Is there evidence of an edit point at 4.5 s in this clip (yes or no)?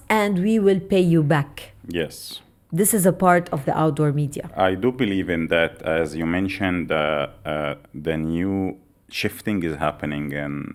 no